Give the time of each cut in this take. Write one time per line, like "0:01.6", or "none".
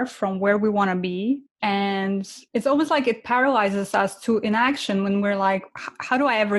0:01.5
0:02.4